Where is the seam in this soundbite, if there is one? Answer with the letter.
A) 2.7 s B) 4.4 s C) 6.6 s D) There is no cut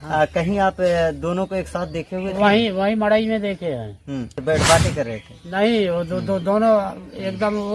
B